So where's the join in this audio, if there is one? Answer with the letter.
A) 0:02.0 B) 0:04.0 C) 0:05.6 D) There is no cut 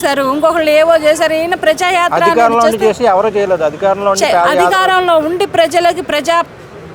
D